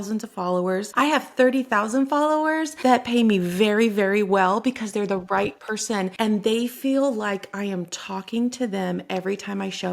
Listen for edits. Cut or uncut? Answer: cut